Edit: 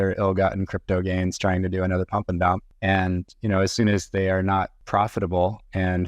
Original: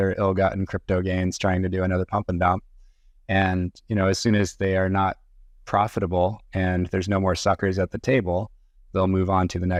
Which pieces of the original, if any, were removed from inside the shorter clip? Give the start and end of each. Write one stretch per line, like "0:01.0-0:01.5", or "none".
0:02.7-0:03.2
0:05.2-0:05.6